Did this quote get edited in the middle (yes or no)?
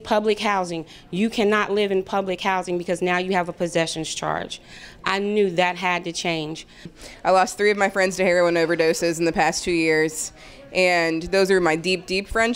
yes